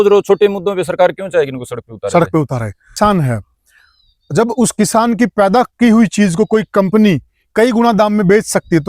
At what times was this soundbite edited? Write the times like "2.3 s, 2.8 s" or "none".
3.0 s